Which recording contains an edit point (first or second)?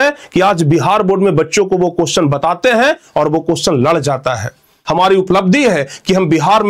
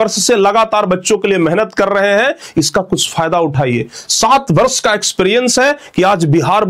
first